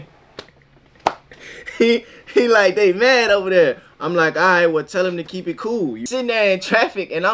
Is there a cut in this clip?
yes; 1 cut; at 6.1 s

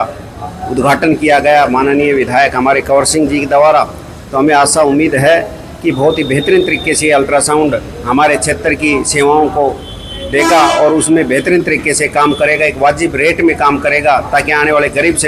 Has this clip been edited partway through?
no; 0 cuts

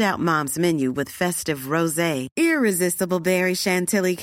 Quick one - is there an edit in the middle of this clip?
no; 0 cuts

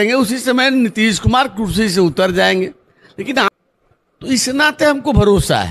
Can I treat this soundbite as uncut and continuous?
no; 1 cut; at 3.5 s

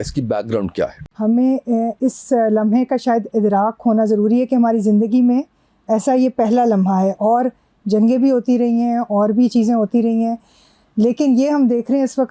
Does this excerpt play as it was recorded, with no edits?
no; 1 cut; at 1.0 s

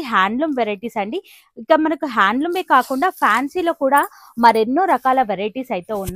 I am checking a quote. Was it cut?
no; 0 cuts

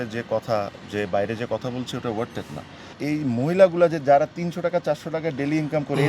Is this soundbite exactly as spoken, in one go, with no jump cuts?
no; 1 cut; at 3.0 s

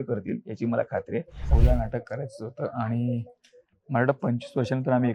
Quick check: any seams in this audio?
yes; 1 cut; at 1.5 s

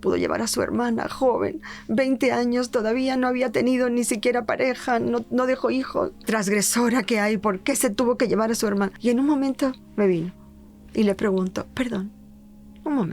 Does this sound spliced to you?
yes; 2 cuts; at 6.2 s, 8.9 s

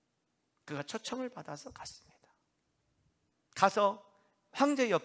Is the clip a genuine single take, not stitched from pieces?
no; 1 cut; at 3.3 s

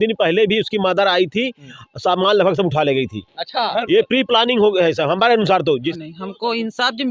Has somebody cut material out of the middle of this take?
yes; 1 cut; at 5.9 s

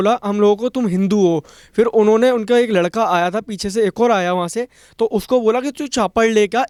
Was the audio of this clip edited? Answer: no; 0 cuts

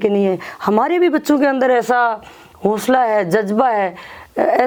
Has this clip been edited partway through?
no; 0 cuts

